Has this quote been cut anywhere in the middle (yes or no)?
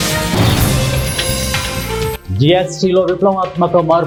no